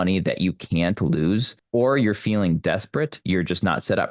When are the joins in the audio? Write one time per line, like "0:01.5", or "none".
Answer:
0:01.6
0:03.2